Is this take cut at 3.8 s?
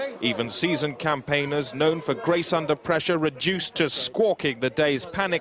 yes; 1 cut; at 3.8 s

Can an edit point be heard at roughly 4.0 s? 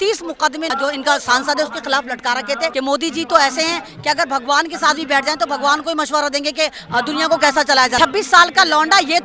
no; 3 cuts; at 0.7 s, 2.7 s, 7.9 s

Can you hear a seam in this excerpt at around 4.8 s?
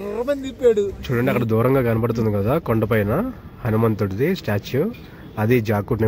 no; 1 cut; at 1.0 s

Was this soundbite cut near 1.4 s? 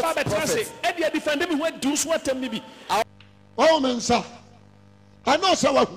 no; 1 cut; at 3.0 s

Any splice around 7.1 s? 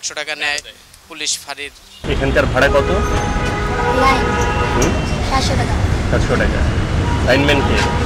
no; 1 cut; at 1.9 s

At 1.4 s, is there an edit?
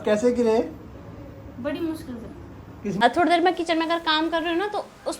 no; 1 cut; at 3.0 s

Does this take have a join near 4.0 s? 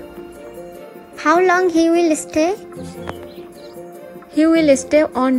yes; 1 cut; at 4.0 s

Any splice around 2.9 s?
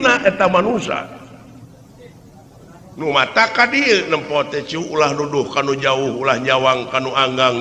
yes; 1 cut; at 2.9 s

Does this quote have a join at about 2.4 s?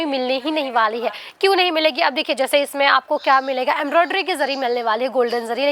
no; 0 cuts

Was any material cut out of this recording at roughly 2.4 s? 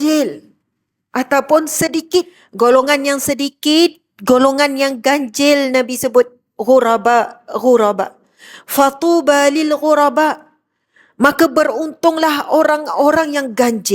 yes; 1 cut; at 2.4 s

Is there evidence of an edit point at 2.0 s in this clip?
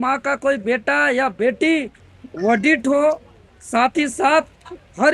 yes; 1 cut; at 2.0 s

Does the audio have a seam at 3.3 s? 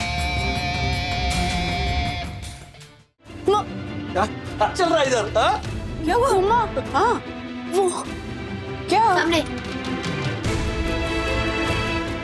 yes; 1 cut; at 3.3 s

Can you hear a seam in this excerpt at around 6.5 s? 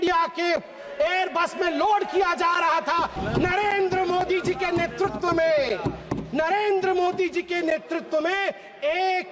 no; 1 cut; at 3.2 s

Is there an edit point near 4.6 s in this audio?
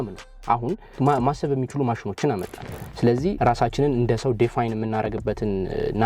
no; 2 cuts; at 1.0 s, 3.4 s

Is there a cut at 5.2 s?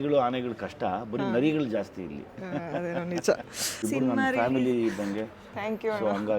no; 1 cut; at 3.8 s

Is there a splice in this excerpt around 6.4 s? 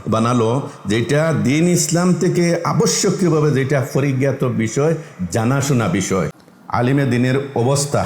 yes; 1 cut; at 6.4 s

